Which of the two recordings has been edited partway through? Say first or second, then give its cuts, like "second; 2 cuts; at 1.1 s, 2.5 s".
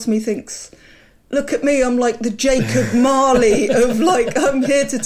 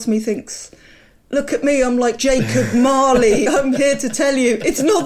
second; 2 cuts; at 2.2 s, 3.5 s